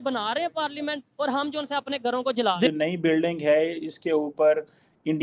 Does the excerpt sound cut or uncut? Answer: cut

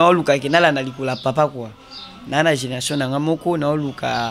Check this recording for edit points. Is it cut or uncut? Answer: uncut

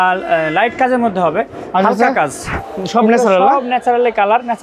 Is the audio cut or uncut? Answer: cut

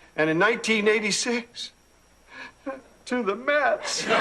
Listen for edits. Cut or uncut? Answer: uncut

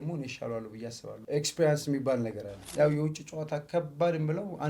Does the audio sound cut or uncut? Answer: cut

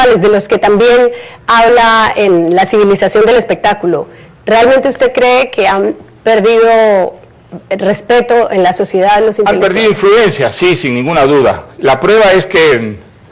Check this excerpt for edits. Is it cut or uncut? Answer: cut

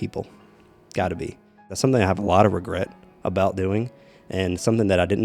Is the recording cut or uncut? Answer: cut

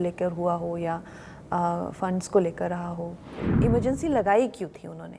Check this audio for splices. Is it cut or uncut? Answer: cut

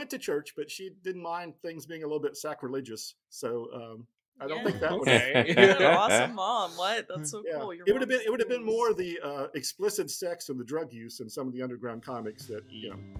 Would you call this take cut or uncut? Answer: uncut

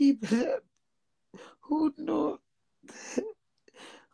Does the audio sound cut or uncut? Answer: uncut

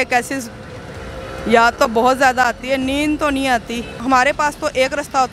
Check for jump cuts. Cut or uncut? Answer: cut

